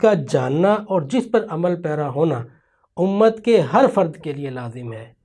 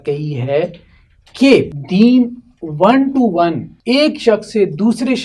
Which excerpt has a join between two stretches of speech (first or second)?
second